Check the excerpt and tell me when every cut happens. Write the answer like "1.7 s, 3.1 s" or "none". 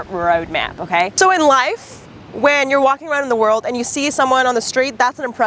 1.1 s